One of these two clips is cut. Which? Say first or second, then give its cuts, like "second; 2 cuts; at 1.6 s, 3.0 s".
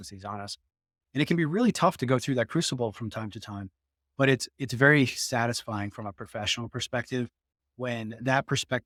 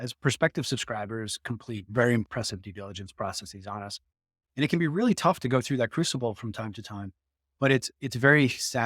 second; 1 cut; at 2.3 s